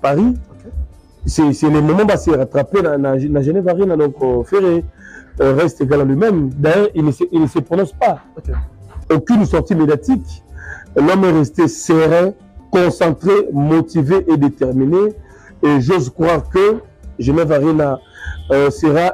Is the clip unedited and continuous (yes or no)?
yes